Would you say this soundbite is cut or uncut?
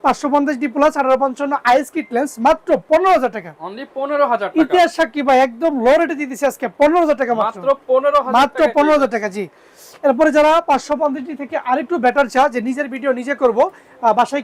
uncut